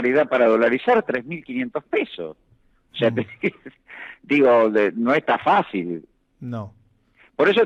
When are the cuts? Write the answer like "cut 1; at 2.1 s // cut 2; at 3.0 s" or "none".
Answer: none